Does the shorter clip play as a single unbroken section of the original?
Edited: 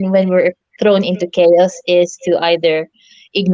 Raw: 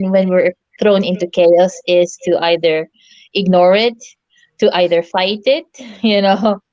yes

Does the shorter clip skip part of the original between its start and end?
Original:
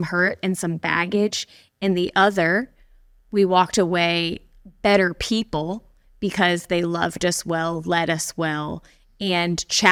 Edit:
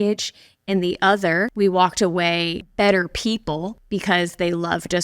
yes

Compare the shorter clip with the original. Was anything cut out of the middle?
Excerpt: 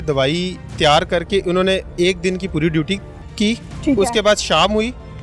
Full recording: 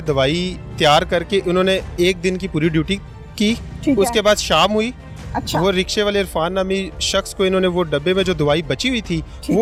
no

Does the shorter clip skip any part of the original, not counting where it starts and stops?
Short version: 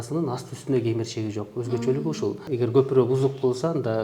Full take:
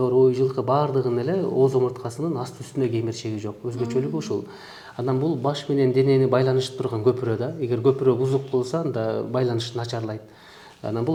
yes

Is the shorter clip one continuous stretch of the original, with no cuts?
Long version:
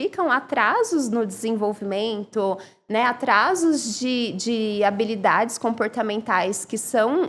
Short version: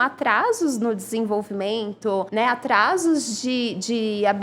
no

